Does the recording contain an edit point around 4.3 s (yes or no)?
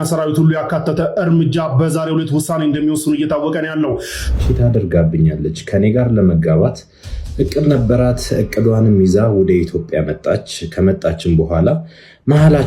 yes